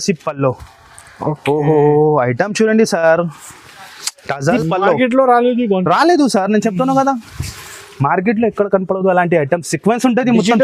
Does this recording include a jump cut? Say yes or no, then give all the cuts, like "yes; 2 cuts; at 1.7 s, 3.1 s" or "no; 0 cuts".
yes; 1 cut; at 4.5 s